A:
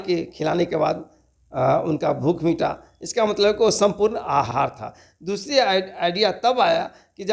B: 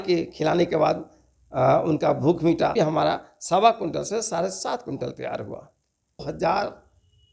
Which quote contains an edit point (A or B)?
B